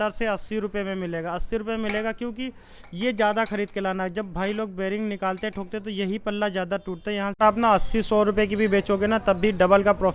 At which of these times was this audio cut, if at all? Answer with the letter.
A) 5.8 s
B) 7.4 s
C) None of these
B